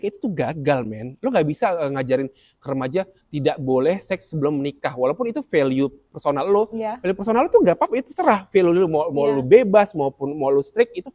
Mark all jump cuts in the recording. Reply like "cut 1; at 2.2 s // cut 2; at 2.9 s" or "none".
none